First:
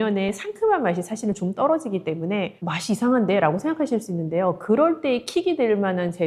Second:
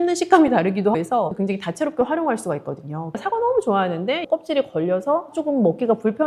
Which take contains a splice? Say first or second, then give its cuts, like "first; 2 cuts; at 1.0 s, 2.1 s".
second; 3 cuts; at 1.1 s, 3.2 s, 4.3 s